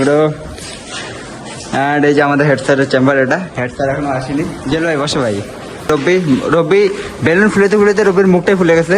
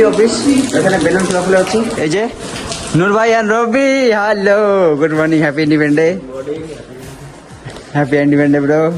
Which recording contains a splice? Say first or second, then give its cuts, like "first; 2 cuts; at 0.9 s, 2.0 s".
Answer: first; 1 cut; at 5.9 s